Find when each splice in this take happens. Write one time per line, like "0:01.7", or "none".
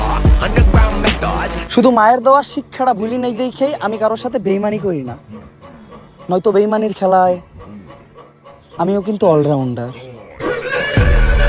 0:01.6

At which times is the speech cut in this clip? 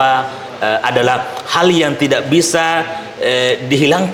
none

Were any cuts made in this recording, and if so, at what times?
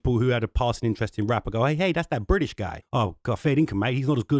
0:02.8

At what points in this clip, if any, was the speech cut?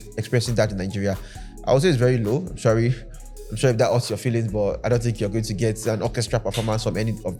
none

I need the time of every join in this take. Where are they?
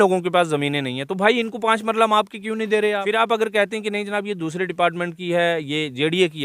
0:03.2

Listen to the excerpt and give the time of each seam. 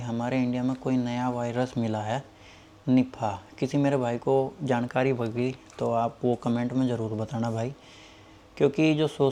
none

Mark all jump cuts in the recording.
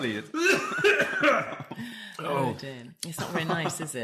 none

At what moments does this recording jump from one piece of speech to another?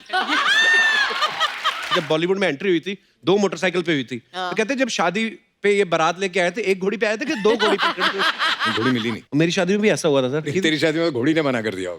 0:01.9
0:08.9
0:10.5

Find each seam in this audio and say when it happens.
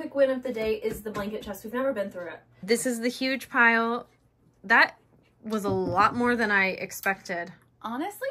0:02.6

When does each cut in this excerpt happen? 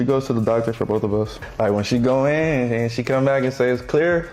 0:01.3

